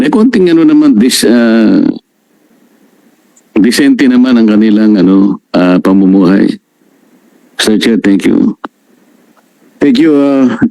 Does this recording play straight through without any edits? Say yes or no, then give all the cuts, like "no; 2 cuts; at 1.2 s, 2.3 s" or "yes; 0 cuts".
yes; 0 cuts